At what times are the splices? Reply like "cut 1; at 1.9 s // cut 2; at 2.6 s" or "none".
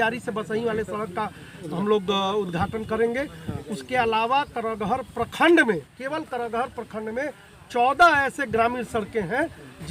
none